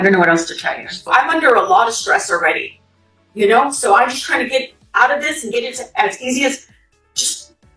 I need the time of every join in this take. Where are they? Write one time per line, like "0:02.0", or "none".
0:01.1

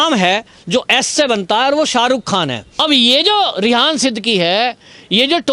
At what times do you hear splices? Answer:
0:02.6

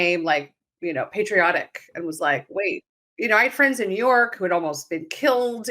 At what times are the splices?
none

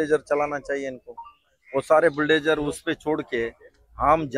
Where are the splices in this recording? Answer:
none

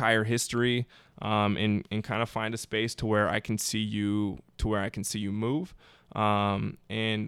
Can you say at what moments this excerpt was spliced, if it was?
none

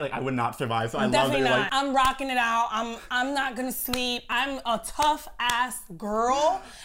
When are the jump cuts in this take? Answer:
0:01.7
0:04.2

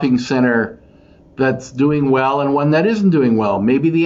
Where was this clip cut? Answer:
none

